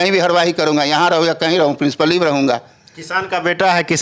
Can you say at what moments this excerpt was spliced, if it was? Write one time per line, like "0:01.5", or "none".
none